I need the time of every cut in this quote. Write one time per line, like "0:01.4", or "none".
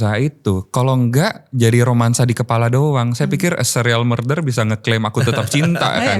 none